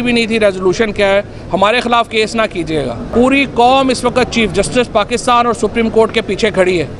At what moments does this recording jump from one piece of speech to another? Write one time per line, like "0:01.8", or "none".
0:03.0